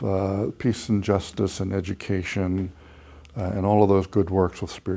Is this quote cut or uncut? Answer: uncut